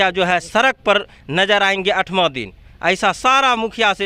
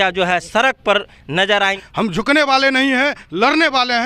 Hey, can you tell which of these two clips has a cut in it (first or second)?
second